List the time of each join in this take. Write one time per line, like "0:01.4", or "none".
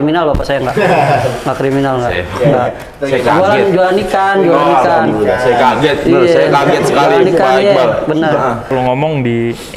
0:08.7

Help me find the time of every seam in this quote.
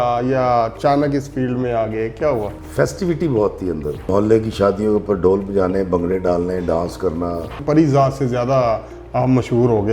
0:02.6
0:04.0
0:07.6

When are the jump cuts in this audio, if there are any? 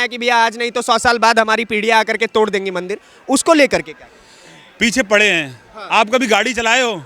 none

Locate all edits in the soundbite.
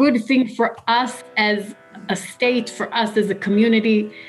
0:01.2

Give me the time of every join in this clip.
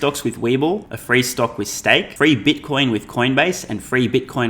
0:00.9
0:02.1

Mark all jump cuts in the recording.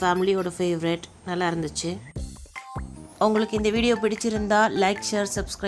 none

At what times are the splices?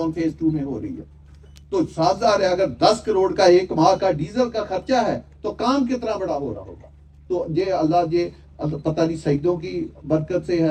none

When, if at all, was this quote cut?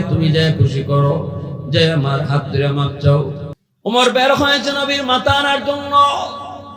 0:03.5

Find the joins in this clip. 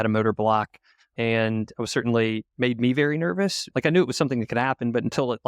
none

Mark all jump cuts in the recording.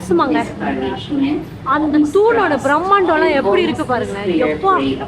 none

